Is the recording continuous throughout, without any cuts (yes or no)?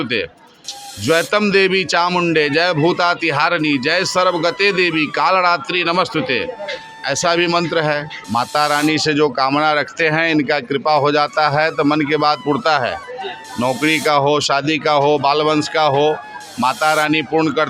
no